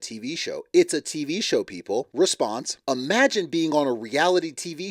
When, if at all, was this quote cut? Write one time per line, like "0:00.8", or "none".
0:02.1
0:02.7